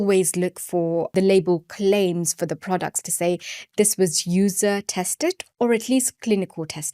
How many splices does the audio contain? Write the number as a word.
one